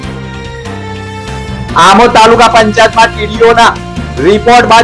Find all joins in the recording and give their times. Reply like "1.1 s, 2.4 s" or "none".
1.4 s